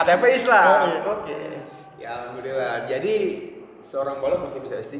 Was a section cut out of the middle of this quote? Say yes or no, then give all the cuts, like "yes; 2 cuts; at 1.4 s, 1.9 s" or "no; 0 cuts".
no; 0 cuts